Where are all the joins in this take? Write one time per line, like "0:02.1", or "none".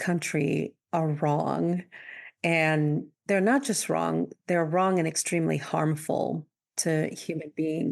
0:03.1